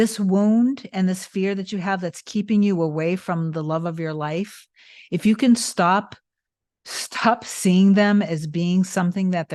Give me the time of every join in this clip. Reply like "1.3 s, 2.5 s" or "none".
none